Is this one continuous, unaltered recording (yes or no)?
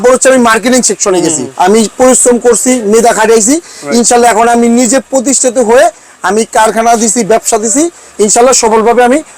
no